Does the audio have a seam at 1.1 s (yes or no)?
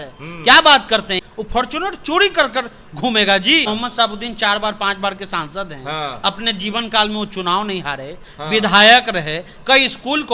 yes